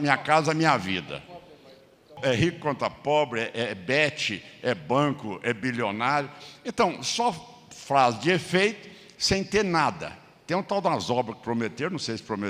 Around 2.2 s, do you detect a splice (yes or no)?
yes